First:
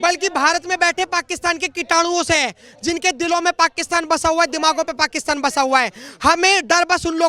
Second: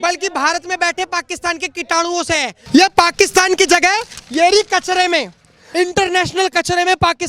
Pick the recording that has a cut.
second; 2 cuts; at 2.6 s, 5.6 s

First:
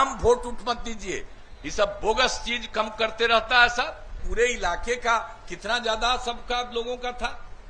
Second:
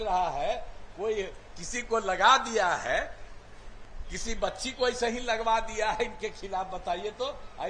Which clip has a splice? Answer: first; 1 cut; at 4.1 s

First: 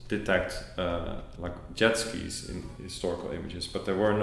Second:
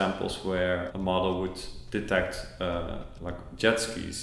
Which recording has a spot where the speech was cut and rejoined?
second; 1 cut; at 0.9 s

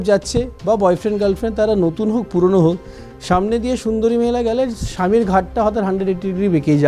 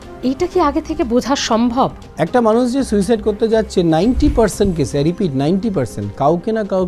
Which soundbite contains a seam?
second; 1 cut; at 2.0 s

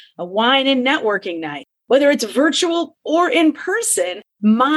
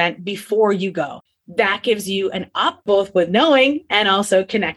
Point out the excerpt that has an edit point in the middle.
second; 1 cut; at 1.2 s

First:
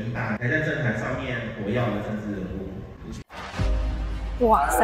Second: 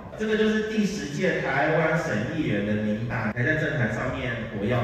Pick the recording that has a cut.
first; 1 cut; at 3.2 s

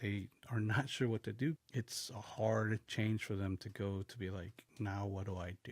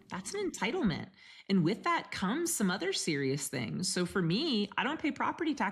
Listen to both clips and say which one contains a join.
first; 1 cut; at 1.6 s

